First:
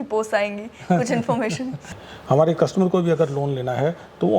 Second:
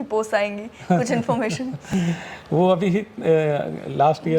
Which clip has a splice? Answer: first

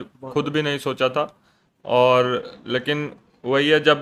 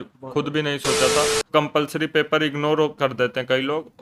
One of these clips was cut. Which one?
second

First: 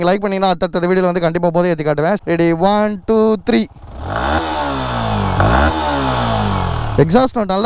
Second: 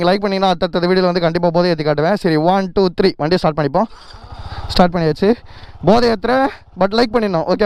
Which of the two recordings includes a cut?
first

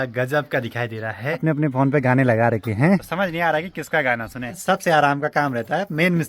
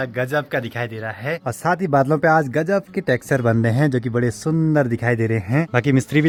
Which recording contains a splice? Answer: first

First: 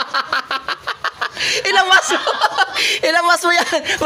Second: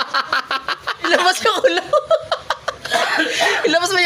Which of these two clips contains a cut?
second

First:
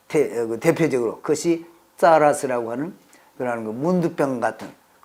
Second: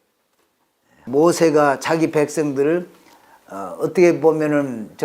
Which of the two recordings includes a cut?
second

